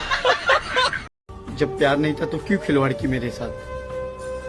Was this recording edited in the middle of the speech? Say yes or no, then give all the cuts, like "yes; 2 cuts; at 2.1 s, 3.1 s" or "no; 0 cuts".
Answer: yes; 1 cut; at 1.0 s